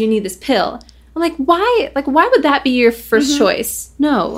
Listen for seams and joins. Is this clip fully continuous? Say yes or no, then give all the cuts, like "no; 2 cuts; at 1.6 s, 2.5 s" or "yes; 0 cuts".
no; 1 cut; at 3.1 s